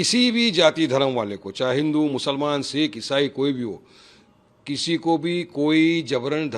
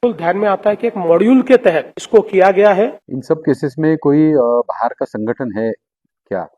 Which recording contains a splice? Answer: second; 2 cuts; at 1.9 s, 3.1 s

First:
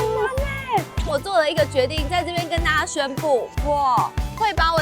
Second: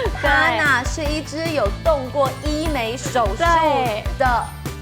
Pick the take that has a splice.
first; 1 cut; at 1.0 s

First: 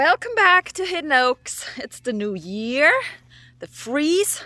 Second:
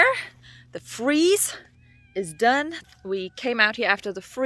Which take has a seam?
second; 1 cut; at 2.8 s

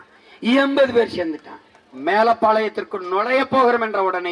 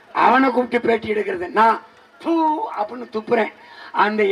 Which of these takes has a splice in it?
first; 1 cut; at 2.0 s

